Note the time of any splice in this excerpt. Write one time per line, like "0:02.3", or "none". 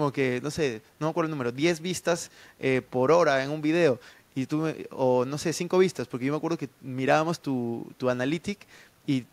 none